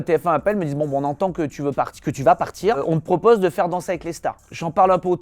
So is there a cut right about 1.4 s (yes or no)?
no